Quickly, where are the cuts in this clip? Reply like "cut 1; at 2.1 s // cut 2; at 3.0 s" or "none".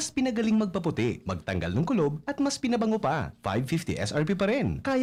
none